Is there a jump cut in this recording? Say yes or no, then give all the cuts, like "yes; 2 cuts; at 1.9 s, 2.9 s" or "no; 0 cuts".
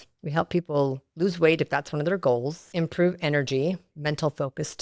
yes; 2 cuts; at 2.7 s, 3.9 s